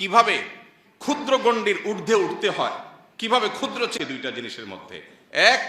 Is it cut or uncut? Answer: cut